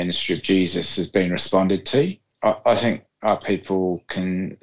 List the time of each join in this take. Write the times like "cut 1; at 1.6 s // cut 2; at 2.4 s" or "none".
cut 1; at 2.3 s